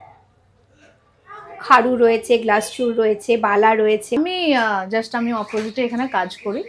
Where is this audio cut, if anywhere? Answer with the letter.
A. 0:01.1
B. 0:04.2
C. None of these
B